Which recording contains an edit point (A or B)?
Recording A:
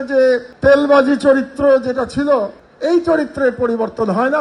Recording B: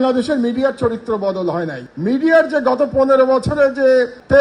B